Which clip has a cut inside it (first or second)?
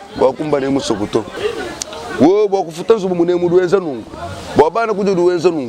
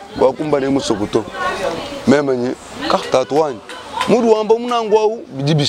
first